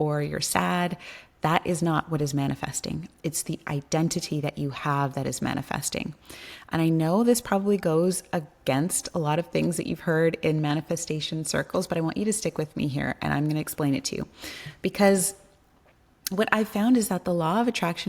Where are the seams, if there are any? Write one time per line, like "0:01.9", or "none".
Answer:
none